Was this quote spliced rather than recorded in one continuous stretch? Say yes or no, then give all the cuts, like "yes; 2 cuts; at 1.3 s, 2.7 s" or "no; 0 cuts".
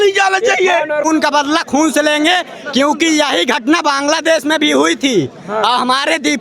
yes; 1 cut; at 1.1 s